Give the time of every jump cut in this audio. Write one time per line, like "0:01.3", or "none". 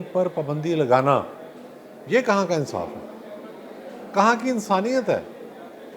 none